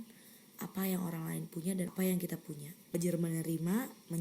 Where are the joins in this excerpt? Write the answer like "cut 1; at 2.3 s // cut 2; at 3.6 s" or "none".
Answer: cut 1; at 1.9 s // cut 2; at 2.9 s